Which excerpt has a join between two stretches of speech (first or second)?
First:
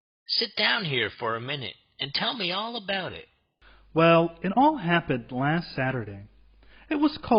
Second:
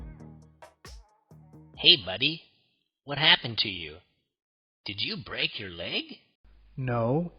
second